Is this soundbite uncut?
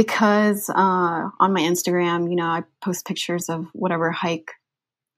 yes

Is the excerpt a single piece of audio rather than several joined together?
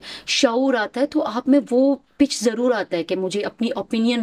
yes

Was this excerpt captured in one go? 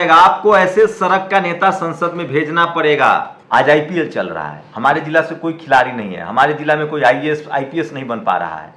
no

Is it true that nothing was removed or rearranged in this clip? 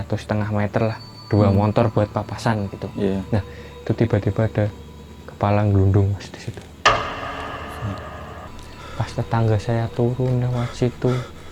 no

